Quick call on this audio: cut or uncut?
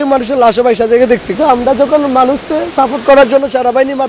cut